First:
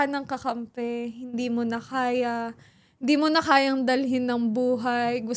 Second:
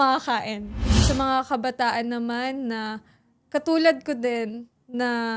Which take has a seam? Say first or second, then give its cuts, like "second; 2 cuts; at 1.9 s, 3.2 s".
second; 1 cut; at 1.0 s